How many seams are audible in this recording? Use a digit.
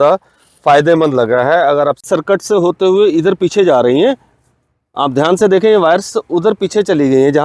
1